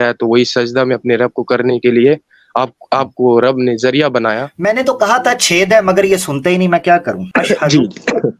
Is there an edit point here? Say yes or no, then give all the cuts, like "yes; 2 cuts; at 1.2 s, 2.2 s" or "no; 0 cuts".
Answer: yes; 2 cuts; at 4.5 s, 7.2 s